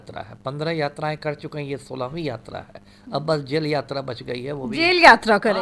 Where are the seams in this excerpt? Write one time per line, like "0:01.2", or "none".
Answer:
none